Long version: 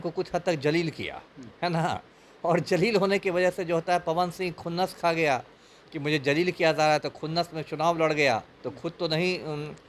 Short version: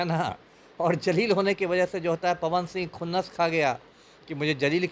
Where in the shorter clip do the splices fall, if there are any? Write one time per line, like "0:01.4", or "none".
none